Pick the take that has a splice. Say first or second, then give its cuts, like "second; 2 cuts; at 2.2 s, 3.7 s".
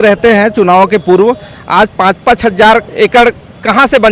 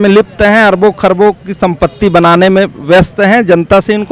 first; 1 cut; at 2.9 s